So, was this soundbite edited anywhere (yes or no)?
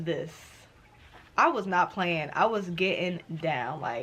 no